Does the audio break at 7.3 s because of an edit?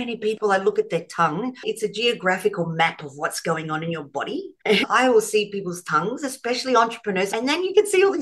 yes; 2 cuts; at 1.6 s, 7.3 s

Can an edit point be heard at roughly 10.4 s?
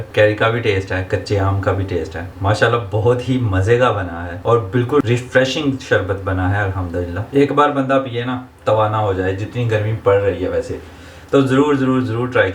no; 1 cut; at 7.2 s

